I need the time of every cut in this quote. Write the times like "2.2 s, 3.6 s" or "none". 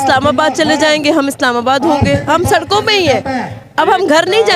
none